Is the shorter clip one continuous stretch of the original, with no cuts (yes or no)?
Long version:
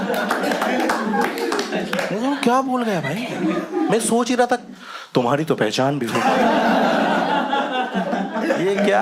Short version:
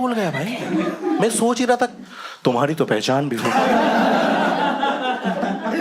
yes